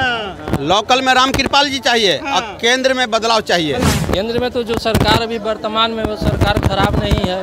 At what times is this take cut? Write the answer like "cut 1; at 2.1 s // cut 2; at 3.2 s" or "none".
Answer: cut 1; at 3.9 s